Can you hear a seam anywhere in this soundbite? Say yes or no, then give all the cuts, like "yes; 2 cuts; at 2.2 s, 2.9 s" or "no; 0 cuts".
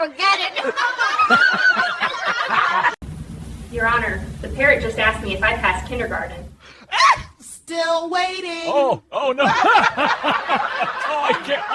no; 0 cuts